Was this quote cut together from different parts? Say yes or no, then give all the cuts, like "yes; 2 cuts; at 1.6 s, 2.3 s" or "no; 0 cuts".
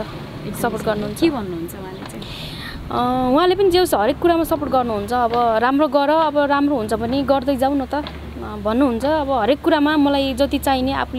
no; 0 cuts